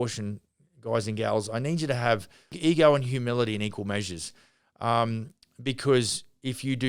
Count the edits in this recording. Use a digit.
1